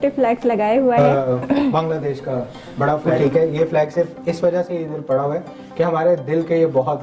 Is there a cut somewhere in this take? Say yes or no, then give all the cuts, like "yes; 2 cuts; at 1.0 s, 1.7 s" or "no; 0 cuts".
yes; 2 cuts; at 1.0 s, 3.1 s